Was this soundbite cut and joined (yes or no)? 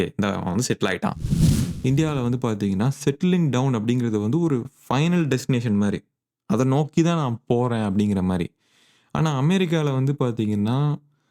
yes